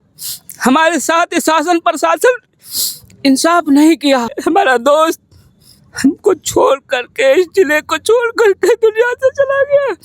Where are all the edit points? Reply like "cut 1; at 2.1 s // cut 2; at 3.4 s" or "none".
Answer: cut 1; at 4.3 s

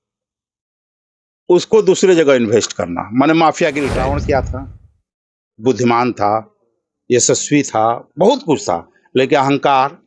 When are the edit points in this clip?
cut 1; at 3.9 s

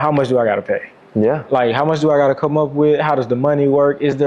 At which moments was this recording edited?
none

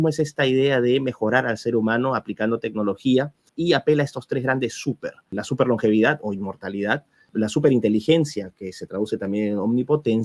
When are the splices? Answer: cut 1; at 3.5 s // cut 2; at 5.3 s // cut 3; at 7.3 s

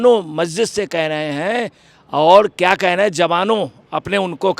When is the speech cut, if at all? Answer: none

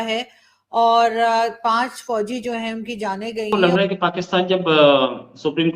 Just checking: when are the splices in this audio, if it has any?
cut 1; at 3.5 s

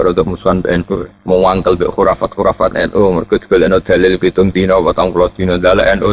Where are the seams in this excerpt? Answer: cut 1; at 1.1 s

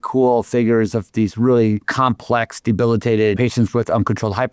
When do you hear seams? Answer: cut 1; at 1.9 s // cut 2; at 3.4 s

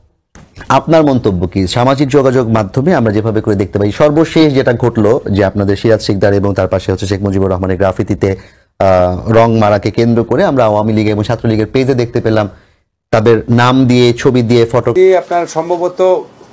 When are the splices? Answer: cut 1; at 14.9 s

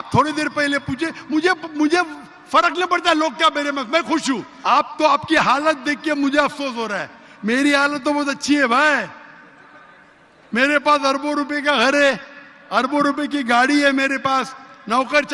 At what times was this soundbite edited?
cut 1; at 4.5 s

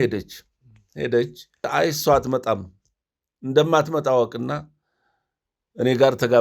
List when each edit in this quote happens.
cut 1; at 1.7 s

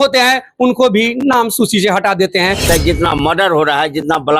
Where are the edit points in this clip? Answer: cut 1; at 2.6 s

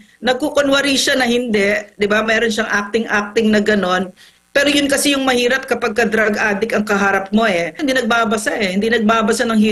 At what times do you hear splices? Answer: cut 1; at 7.8 s

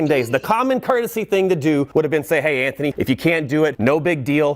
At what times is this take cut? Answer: cut 1; at 1.9 s // cut 2; at 2.9 s // cut 3; at 3.8 s

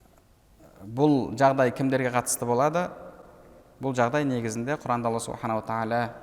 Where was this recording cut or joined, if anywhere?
none

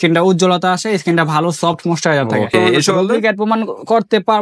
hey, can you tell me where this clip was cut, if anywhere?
cut 1; at 2.8 s

